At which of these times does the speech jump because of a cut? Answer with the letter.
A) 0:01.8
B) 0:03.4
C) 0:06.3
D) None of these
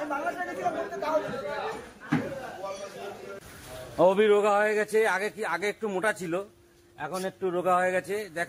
B